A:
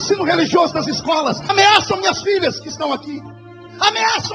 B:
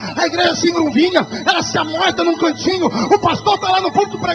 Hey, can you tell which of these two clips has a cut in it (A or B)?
A